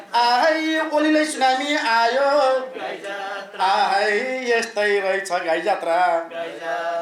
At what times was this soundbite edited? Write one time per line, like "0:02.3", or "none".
none